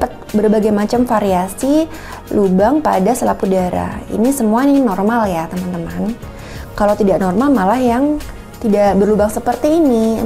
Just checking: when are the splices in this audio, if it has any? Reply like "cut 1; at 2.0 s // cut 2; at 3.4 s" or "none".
none